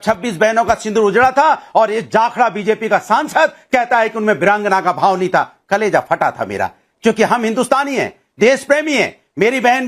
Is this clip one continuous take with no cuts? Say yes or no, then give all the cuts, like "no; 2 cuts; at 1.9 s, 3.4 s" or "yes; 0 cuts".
yes; 0 cuts